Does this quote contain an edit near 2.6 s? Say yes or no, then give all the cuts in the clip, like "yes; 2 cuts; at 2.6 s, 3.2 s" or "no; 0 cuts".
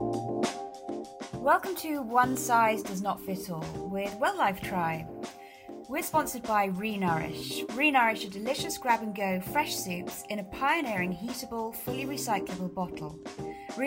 no; 1 cut; at 1.4 s